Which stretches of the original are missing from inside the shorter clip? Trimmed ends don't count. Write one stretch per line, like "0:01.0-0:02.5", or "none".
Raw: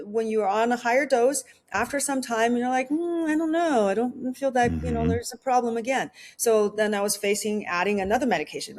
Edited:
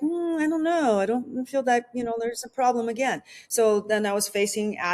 none